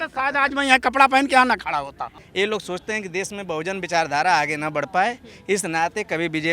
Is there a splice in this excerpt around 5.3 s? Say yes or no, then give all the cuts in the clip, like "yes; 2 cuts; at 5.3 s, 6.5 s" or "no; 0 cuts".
no; 1 cut; at 2.2 s